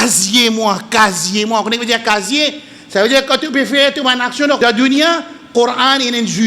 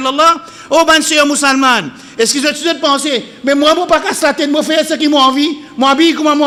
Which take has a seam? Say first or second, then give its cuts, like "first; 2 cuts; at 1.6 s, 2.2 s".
first; 1 cut; at 4.6 s